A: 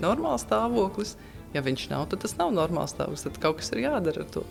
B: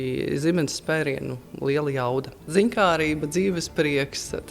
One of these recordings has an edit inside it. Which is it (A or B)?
B